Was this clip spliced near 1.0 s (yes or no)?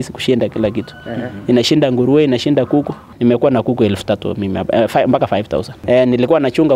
no